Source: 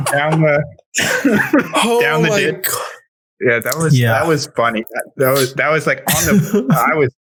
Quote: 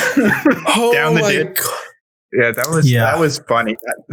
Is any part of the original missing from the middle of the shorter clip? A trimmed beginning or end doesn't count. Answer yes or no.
no